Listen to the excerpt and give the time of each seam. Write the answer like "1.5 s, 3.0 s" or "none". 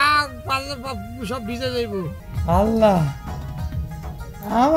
2.2 s